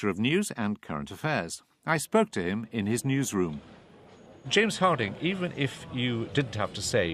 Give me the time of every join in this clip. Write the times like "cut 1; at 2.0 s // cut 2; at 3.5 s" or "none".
none